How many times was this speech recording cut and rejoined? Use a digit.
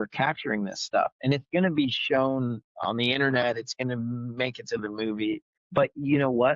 1